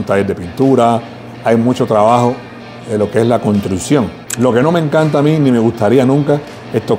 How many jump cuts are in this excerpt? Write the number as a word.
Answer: one